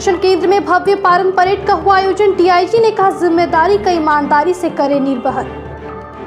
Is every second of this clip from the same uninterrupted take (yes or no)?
yes